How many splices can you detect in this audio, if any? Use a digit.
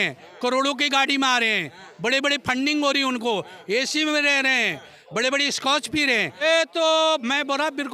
1